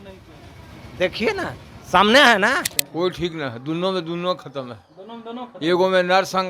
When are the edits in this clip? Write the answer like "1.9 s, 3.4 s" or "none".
2.8 s